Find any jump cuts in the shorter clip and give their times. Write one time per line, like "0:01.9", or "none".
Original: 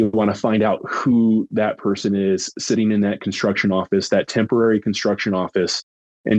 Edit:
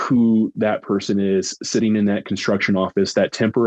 none